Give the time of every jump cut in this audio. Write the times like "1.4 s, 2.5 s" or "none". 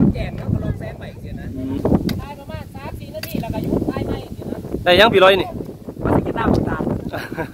1.8 s